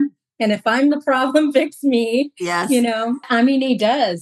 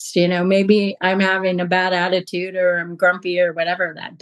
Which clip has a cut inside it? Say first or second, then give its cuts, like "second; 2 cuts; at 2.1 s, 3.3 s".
first; 1 cut; at 3.3 s